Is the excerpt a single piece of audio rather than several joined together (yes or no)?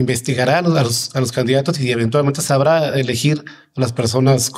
yes